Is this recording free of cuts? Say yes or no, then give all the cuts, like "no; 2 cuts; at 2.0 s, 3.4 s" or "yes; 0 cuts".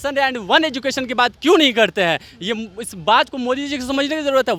yes; 0 cuts